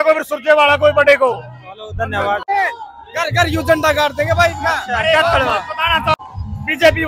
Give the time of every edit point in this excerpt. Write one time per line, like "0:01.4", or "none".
0:02.5
0:06.2